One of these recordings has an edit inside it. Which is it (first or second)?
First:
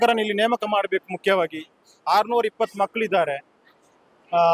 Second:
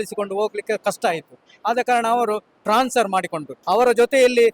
second